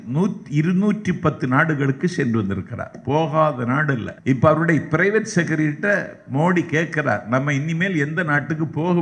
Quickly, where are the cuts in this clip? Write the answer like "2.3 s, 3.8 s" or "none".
4.1 s